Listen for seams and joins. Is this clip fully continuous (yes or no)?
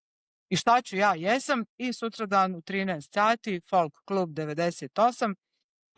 yes